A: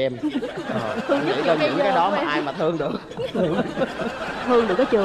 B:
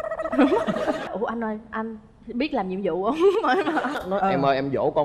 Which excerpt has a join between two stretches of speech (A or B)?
B